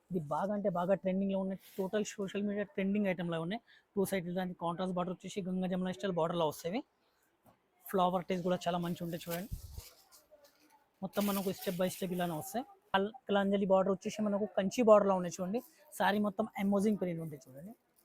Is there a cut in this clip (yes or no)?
yes